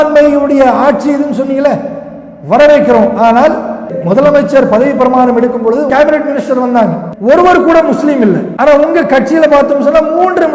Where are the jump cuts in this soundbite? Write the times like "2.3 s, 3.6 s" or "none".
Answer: 3.9 s, 5.9 s, 7.1 s, 8.5 s